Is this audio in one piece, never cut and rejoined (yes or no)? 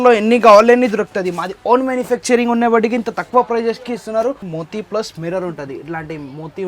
no